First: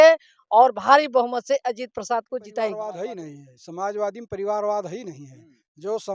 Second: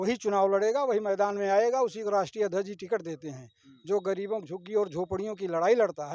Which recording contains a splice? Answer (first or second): first